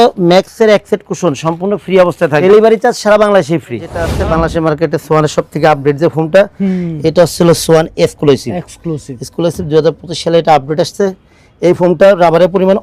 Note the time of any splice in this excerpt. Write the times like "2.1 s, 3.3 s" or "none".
2.4 s, 4.1 s